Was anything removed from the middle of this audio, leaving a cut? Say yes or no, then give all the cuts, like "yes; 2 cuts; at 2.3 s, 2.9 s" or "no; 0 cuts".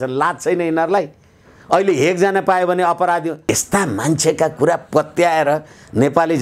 yes; 1 cut; at 3.4 s